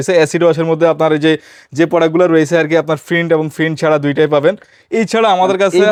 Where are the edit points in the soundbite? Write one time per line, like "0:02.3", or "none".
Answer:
none